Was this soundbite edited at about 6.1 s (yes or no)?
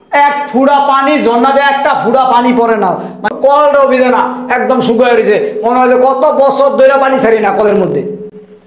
no